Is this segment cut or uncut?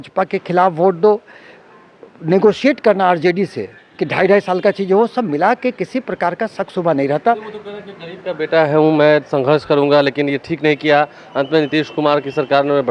uncut